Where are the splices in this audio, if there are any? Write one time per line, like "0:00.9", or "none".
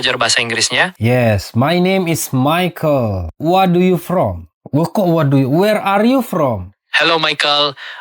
0:00.9